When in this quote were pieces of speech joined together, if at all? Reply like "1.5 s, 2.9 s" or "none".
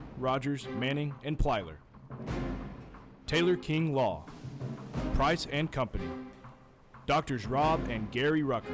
1.8 s, 3.3 s

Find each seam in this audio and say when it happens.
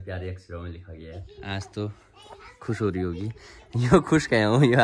1.2 s

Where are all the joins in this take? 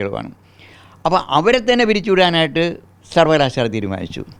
none

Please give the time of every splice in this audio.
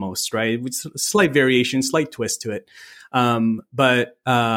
none

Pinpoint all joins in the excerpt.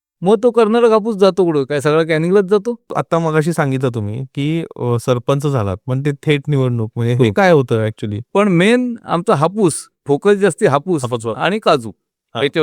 2.9 s, 8.2 s

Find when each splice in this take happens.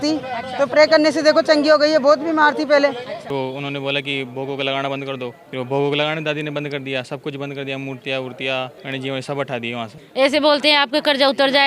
3.2 s, 5.4 s, 8.8 s, 10.0 s

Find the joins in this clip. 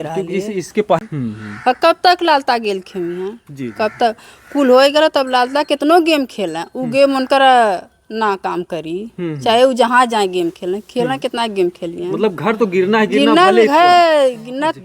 1.0 s

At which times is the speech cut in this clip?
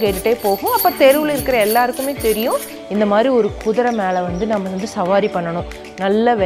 2.8 s

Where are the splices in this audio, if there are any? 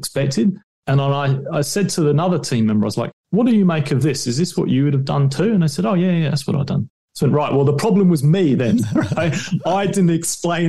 none

